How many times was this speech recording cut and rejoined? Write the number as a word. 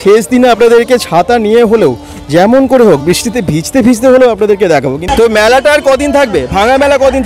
one